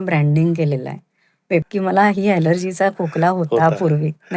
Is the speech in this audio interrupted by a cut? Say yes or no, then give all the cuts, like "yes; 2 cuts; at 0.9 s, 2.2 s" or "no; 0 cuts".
yes; 1 cut; at 1.7 s